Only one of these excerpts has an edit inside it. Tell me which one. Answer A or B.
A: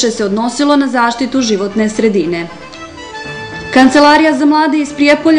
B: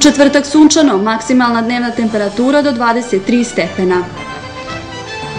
B